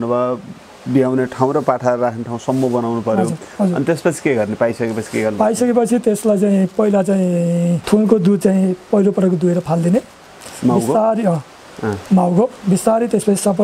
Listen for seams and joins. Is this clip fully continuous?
no; 2 cuts; at 3.5 s, 7.8 s

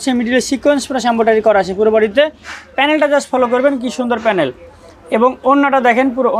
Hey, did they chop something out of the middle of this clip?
no; 0 cuts

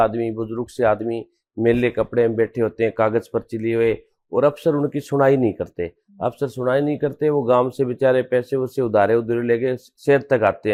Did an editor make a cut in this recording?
no; 0 cuts

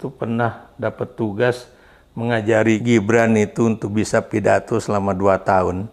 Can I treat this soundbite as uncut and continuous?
no; 1 cut; at 2.8 s

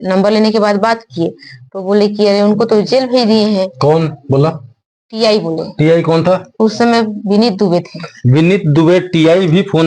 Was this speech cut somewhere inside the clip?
no; 0 cuts

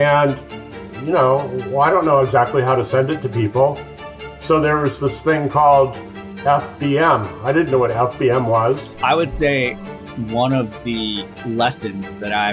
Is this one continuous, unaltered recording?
no; 1 cut; at 8.9 s

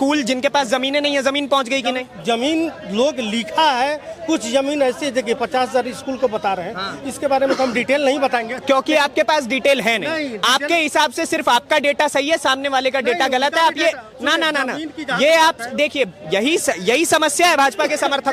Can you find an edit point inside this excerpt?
no; 0 cuts

